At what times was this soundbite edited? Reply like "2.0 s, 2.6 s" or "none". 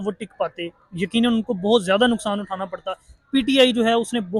none